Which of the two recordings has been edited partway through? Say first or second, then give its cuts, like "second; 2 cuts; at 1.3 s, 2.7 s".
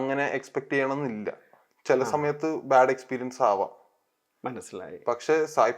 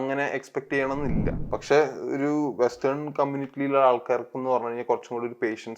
second; 1 cut; at 1.4 s